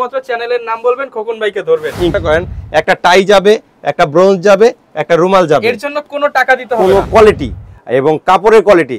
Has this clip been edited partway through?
yes; 2 cuts; at 2.2 s, 7.1 s

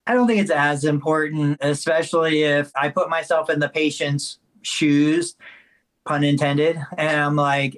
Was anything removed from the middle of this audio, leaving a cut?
yes; 2 cuts; at 1.6 s, 2.7 s

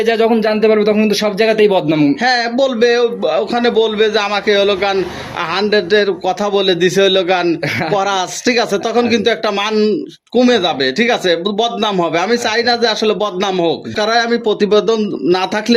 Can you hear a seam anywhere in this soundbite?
no; 0 cuts

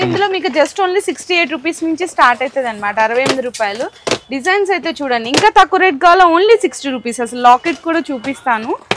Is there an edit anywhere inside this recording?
no; 0 cuts

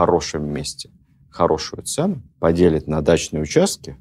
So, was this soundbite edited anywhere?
yes; 1 cut; at 2.3 s

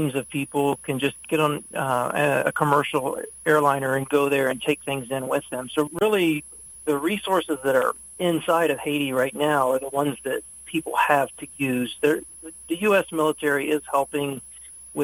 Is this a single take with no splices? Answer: yes; 0 cuts

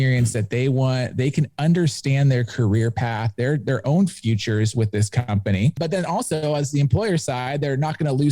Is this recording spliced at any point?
no; 0 cuts

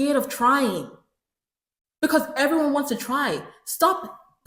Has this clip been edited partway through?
no; 0 cuts

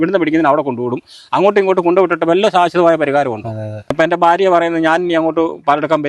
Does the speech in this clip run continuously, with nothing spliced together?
no; 1 cut; at 3.9 s

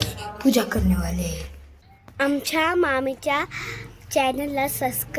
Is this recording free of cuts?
no; 1 cut; at 2.1 s

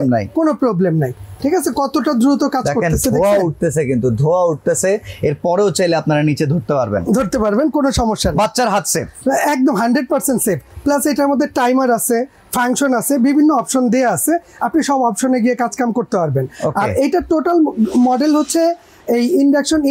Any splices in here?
no; 0 cuts

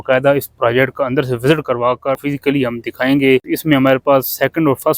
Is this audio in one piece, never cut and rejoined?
no; 2 cuts; at 2.2 s, 3.5 s

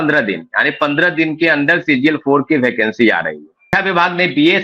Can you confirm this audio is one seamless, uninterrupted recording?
no; 1 cut; at 3.7 s

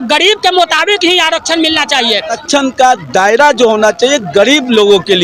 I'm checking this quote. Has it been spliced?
yes; 1 cut; at 2.4 s

